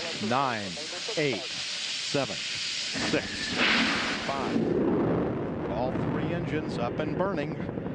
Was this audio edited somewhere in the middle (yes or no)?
no